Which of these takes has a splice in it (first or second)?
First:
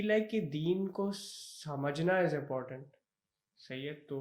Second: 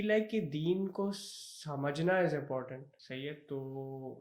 second